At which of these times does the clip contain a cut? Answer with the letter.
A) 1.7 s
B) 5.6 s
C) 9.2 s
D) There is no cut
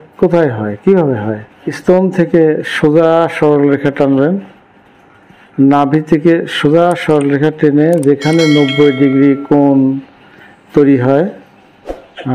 A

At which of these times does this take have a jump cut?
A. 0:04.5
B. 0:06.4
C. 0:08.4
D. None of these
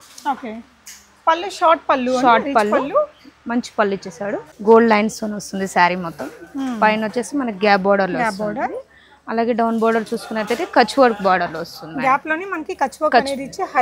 A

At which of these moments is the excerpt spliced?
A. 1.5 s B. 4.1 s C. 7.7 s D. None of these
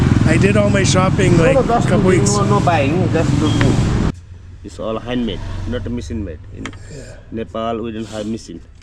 B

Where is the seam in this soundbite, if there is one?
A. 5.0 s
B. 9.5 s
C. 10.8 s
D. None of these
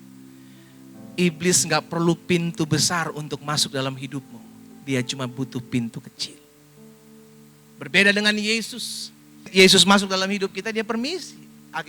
B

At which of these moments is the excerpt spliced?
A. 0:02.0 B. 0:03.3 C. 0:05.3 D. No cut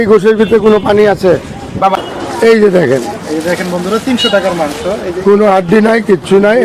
A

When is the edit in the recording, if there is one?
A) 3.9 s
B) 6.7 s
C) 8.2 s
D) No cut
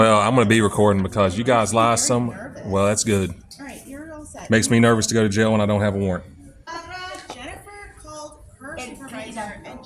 B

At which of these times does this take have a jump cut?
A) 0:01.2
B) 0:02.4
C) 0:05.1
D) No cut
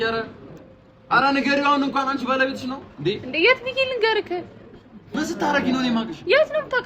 C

